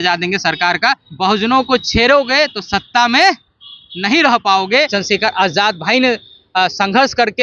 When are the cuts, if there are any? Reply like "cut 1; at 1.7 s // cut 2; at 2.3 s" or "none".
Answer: cut 1; at 1.0 s // cut 2; at 4.9 s